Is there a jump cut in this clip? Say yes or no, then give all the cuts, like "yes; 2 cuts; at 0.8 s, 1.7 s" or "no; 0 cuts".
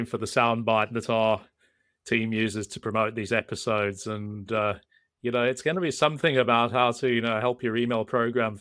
no; 0 cuts